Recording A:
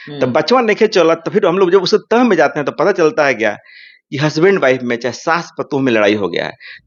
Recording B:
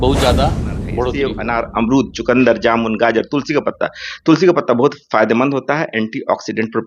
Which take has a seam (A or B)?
B